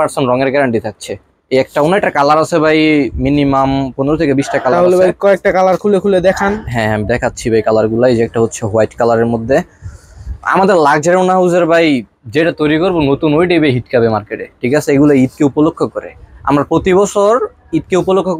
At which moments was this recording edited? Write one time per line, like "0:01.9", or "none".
none